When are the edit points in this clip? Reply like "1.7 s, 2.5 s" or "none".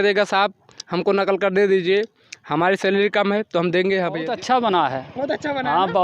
4.3 s